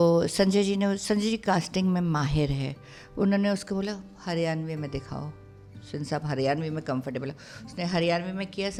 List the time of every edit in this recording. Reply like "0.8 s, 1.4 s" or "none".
none